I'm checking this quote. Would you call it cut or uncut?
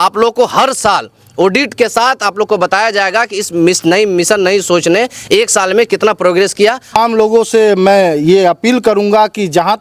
cut